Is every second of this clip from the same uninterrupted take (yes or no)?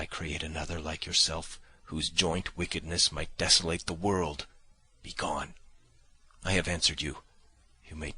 no